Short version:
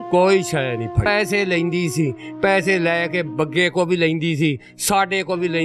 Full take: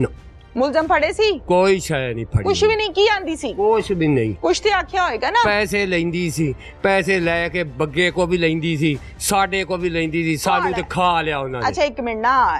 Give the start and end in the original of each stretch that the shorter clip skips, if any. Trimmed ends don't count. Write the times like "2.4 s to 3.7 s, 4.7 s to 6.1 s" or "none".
2.4 s to 5.5 s